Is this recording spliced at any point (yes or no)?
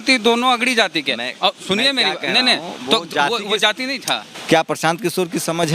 yes